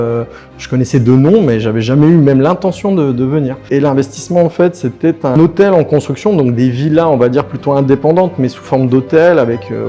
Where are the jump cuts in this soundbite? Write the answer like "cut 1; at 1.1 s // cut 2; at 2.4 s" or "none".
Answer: cut 1; at 3.6 s // cut 2; at 5.3 s